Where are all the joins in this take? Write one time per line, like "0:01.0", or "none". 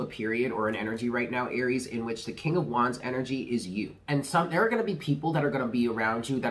0:04.0